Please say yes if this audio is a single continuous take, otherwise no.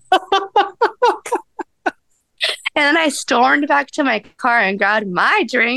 yes